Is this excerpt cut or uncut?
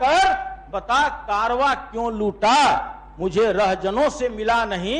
uncut